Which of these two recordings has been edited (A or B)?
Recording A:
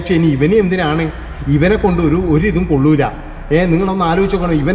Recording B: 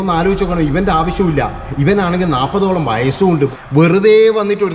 B